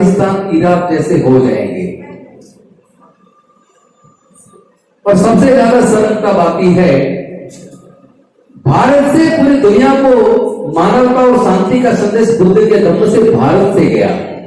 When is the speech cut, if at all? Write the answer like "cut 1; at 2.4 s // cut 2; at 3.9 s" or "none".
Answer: none